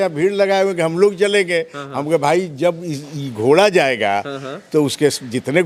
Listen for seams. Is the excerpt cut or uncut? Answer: uncut